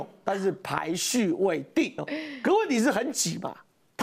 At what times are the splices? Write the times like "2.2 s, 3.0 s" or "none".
2.1 s